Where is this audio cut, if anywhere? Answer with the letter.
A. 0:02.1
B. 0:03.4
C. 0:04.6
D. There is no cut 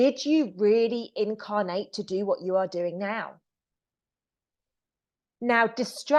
D